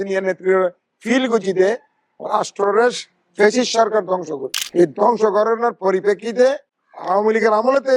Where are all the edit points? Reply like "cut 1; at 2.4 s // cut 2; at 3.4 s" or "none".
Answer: none